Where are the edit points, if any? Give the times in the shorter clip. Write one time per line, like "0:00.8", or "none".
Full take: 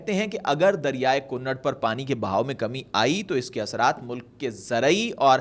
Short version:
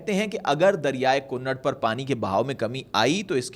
none